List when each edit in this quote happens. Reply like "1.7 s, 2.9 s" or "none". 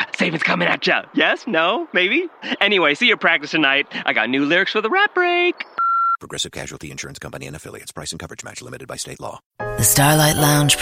9.4 s